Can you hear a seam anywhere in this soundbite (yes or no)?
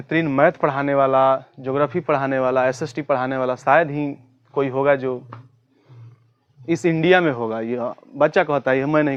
no